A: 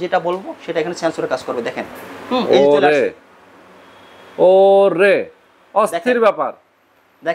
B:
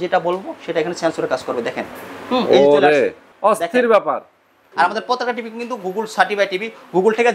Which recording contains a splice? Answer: B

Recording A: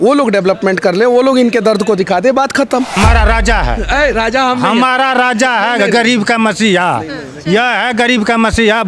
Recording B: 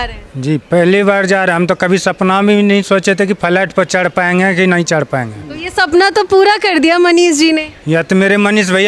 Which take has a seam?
A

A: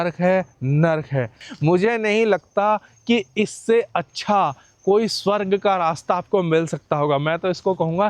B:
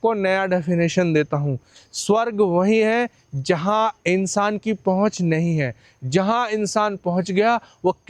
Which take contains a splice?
A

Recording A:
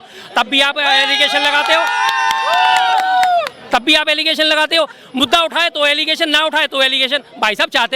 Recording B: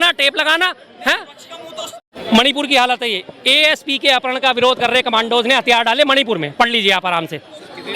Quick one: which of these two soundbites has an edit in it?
B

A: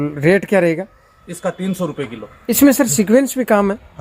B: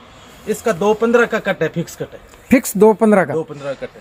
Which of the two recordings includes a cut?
A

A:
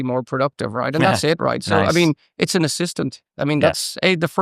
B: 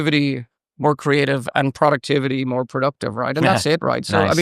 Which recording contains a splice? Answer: A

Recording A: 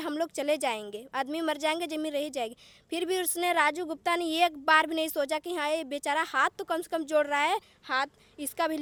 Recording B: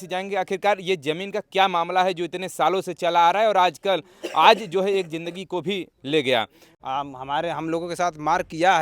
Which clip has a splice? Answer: B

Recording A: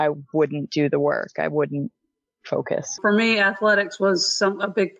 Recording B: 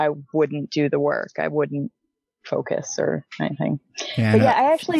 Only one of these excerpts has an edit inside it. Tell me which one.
A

